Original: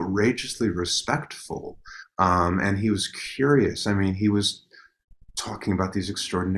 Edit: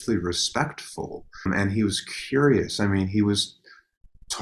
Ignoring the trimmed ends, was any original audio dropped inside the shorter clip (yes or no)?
yes